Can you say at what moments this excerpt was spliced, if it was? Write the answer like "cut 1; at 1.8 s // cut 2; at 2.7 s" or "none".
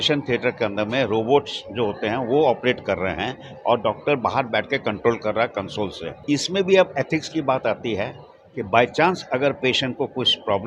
cut 1; at 6.1 s